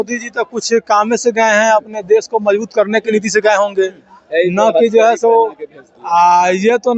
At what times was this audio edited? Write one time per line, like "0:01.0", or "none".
none